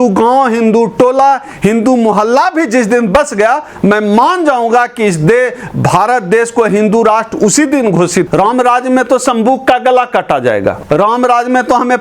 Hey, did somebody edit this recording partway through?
yes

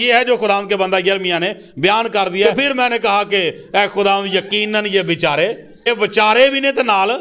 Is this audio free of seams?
no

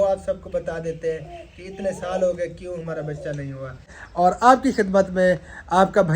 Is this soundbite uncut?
no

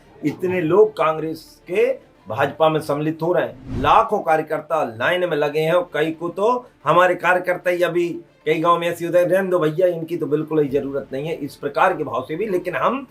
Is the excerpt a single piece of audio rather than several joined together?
no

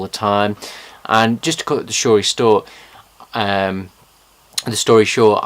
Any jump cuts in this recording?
yes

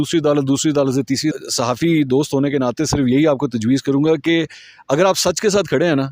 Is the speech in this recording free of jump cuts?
no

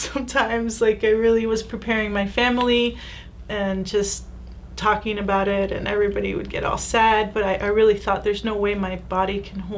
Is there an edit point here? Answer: no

